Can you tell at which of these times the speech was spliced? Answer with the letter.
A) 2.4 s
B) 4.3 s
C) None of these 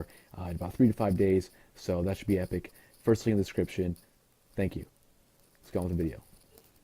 A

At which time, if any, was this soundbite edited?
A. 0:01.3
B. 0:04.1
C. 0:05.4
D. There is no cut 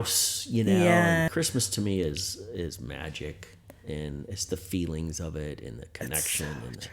A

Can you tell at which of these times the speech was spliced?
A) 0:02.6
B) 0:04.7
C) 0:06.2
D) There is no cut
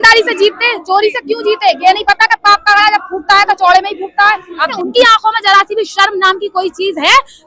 B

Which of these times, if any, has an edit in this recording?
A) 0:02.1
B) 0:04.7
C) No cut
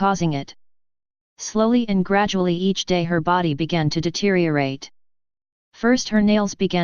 A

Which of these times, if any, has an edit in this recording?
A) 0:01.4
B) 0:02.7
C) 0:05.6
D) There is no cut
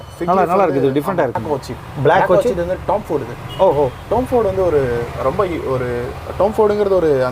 A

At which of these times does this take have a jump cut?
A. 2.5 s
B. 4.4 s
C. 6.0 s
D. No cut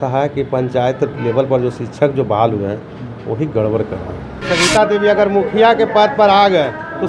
B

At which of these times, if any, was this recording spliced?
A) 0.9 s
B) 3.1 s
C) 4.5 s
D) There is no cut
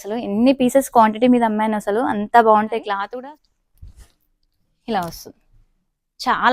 B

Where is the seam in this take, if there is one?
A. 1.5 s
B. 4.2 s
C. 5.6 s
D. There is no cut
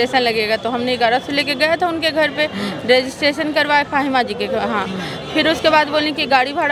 D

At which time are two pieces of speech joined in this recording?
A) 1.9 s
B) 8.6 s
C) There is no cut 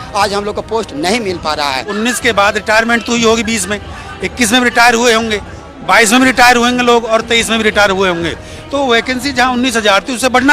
A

